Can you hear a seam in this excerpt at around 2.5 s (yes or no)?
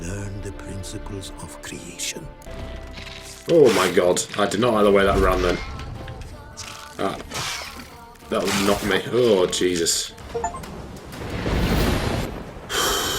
yes